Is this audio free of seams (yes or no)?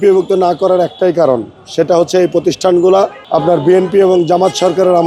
yes